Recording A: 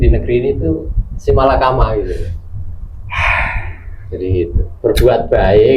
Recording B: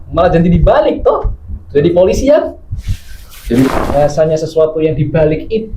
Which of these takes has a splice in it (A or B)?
B